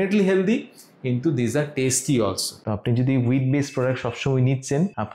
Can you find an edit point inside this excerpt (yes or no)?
yes